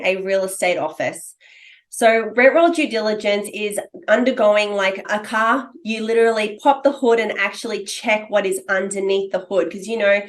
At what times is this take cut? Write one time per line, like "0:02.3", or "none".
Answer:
0:05.0